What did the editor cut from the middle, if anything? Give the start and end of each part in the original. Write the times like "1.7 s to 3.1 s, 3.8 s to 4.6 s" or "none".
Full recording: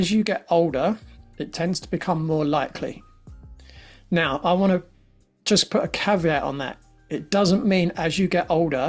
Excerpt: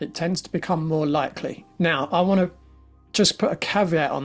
3.0 s to 3.9 s